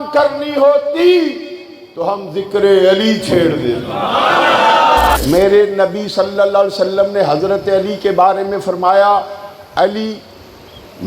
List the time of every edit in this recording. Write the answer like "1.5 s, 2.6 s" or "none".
5.2 s

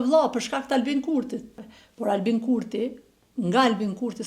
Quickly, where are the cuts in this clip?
1.6 s

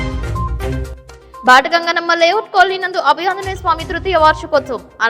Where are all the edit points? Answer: 0.9 s

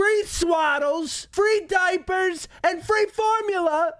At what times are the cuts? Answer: 1.2 s

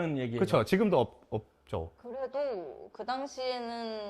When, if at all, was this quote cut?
2.0 s

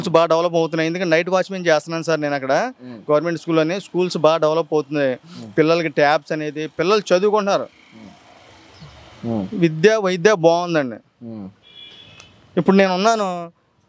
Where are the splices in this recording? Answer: none

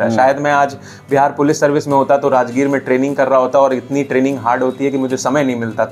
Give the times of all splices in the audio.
none

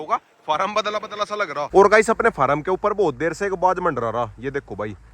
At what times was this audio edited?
1.7 s

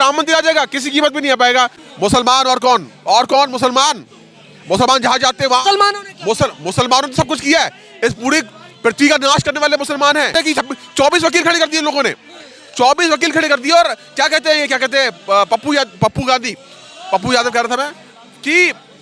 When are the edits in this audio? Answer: 1.8 s, 10.3 s

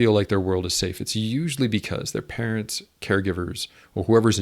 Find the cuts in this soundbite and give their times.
none

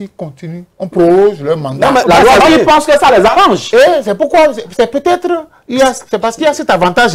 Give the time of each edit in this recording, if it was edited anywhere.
2.4 s

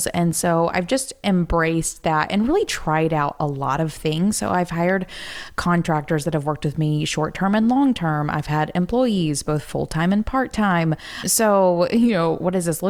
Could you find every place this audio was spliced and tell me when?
11.3 s

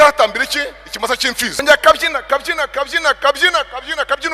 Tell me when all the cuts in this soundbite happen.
1.6 s

